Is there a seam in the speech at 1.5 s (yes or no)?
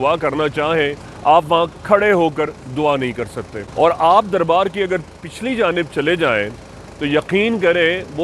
no